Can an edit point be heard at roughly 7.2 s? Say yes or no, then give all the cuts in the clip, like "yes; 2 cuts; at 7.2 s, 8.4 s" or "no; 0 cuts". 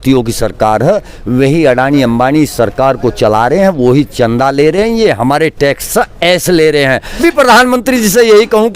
yes; 1 cut; at 7.2 s